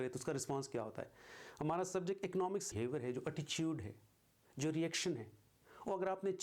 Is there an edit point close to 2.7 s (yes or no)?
yes